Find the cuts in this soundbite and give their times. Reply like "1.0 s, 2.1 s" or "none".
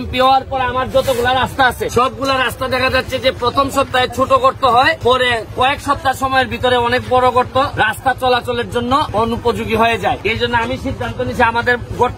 1.9 s, 5.0 s, 7.7 s, 9.1 s, 10.2 s